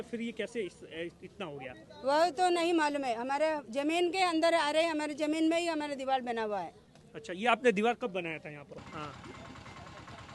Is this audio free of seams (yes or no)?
no